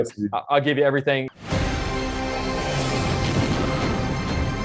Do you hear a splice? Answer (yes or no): yes